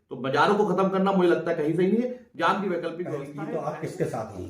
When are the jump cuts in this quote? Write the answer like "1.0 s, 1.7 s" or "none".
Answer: 3.3 s